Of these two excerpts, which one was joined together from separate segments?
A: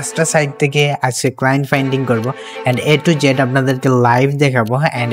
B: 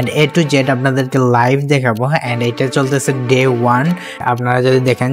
B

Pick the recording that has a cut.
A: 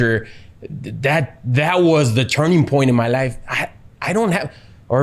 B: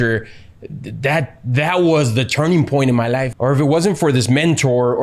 B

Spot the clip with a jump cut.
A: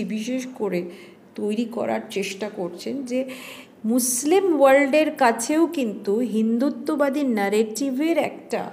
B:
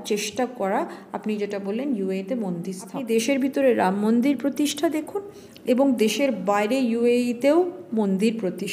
B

